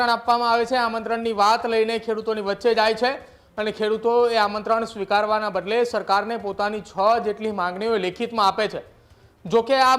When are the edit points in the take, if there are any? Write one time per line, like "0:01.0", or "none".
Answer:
none